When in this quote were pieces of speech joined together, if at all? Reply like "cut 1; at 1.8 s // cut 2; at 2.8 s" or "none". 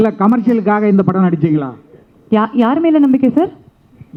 none

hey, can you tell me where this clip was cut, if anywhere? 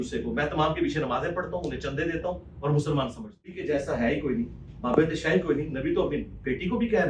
cut 1; at 3.6 s

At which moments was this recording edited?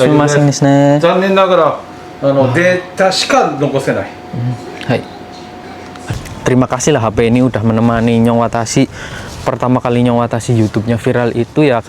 cut 1; at 6.0 s

